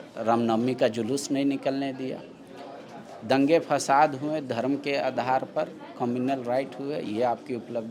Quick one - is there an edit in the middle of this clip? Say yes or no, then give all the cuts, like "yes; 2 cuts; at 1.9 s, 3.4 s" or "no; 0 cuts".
no; 0 cuts